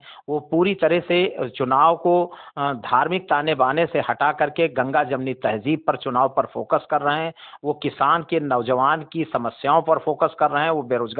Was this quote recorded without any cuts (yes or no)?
yes